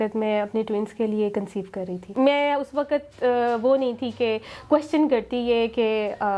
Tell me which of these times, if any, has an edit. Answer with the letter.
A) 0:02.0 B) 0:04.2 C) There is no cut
A